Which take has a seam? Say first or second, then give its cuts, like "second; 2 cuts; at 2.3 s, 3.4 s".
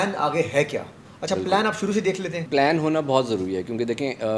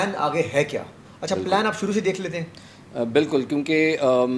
first; 1 cut; at 2.5 s